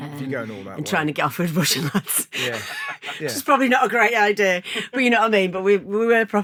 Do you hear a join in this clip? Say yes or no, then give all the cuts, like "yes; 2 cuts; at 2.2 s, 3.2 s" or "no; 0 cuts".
no; 0 cuts